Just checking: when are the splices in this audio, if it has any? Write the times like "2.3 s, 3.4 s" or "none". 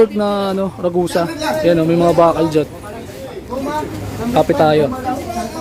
none